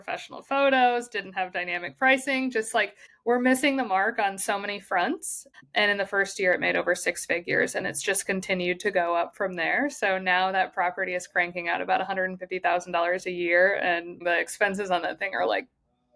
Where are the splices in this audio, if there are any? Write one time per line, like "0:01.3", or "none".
0:05.4
0:14.1